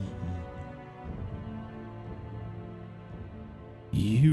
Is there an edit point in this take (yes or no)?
no